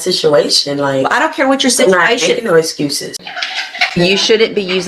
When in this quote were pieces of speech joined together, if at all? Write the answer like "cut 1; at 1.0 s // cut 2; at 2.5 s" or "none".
cut 1; at 3.2 s

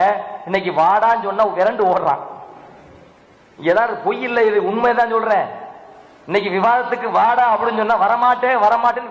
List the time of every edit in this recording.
none

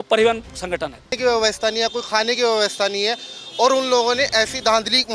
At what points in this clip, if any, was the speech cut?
cut 1; at 1.2 s

